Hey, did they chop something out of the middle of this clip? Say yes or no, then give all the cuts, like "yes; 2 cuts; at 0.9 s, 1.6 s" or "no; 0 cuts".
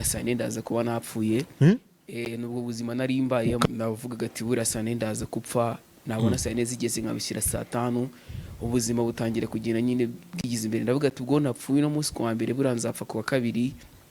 yes; 1 cut; at 3.6 s